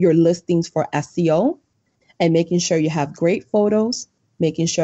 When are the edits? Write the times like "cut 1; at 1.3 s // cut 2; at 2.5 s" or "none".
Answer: none

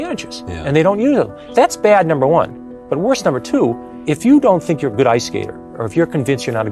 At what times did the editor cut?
cut 1; at 1.4 s // cut 2; at 3.9 s

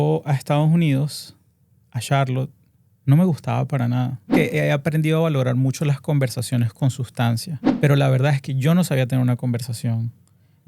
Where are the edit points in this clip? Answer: cut 1; at 4.3 s // cut 2; at 7.6 s

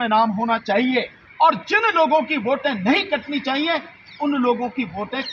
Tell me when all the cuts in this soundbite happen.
cut 1; at 1.2 s

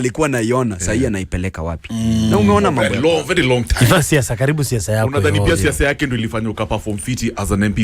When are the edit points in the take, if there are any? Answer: cut 1; at 2.8 s

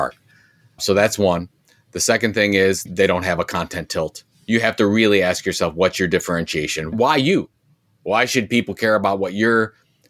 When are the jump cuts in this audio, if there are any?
cut 1; at 2.8 s

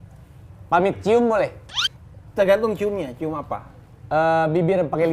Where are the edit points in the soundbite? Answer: none

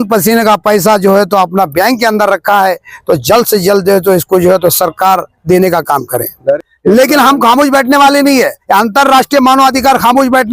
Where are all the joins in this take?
cut 1; at 6.6 s

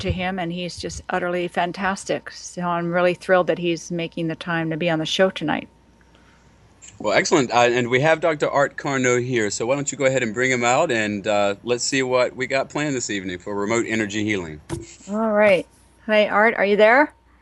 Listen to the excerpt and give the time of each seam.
none

